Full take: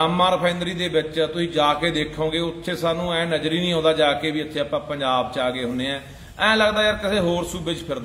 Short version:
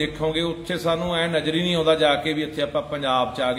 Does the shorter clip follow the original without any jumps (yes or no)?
yes